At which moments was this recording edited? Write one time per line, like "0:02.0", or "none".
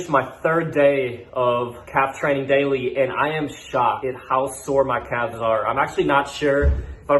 0:01.8
0:04.0